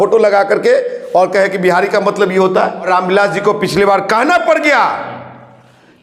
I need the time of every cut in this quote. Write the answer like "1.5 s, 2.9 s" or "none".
2.9 s

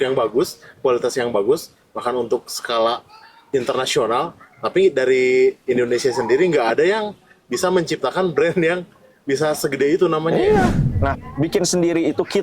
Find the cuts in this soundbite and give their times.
11.1 s

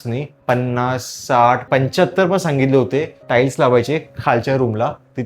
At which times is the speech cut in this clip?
1.6 s

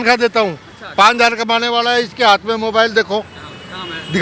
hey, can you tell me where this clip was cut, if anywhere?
none

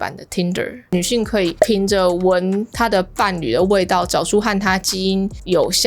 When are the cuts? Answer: 0.9 s

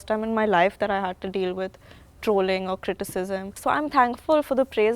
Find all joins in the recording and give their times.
3.6 s

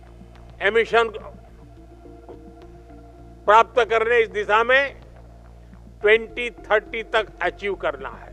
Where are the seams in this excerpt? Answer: 1.3 s, 3.4 s

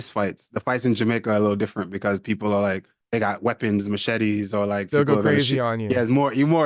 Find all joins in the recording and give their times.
2.9 s

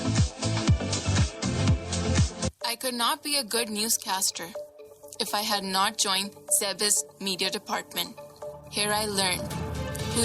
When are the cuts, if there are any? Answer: 1.0 s

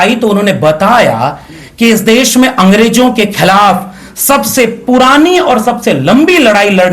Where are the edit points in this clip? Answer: none

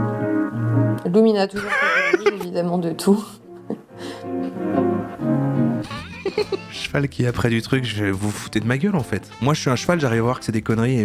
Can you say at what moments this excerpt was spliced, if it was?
none

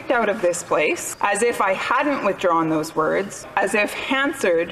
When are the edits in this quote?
1.1 s, 3.5 s

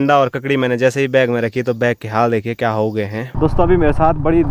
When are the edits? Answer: 3.3 s

